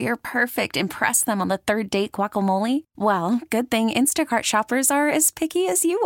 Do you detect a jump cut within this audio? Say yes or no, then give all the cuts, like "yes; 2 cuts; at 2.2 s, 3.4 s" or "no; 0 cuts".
no; 0 cuts